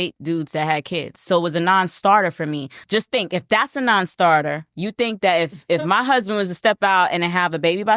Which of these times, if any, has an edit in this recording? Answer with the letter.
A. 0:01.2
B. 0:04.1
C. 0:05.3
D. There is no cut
A